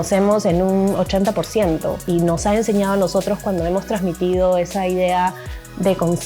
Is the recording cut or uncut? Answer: cut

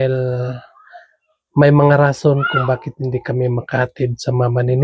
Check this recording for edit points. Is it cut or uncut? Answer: uncut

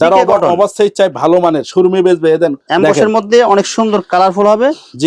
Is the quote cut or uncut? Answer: cut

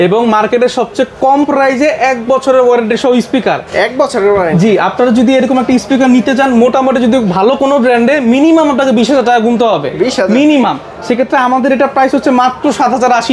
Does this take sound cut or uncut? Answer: uncut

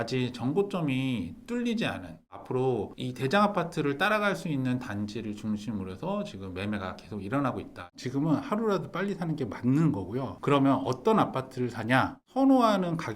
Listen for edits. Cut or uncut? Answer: cut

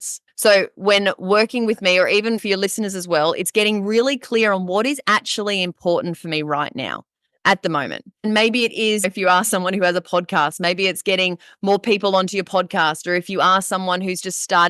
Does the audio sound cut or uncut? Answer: cut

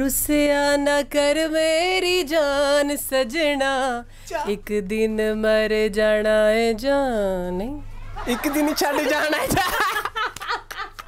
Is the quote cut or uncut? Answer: uncut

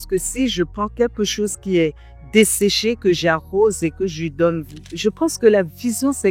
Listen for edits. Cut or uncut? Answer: cut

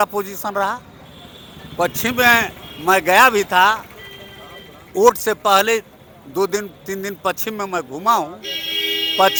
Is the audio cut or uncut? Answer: uncut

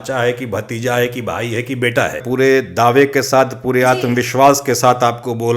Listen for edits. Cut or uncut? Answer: cut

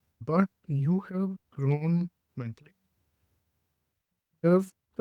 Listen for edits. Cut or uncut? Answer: cut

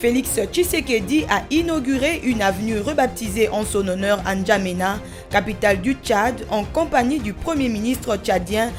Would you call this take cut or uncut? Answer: uncut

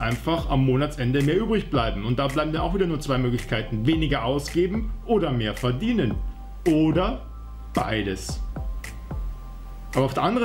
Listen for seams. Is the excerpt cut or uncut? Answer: uncut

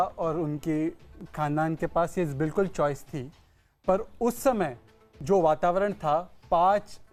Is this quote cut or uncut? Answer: uncut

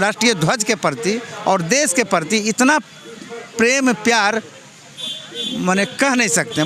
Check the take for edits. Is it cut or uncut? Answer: uncut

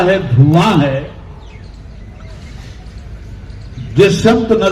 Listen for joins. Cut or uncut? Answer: uncut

